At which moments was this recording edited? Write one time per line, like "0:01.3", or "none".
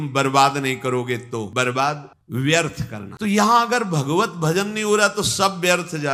none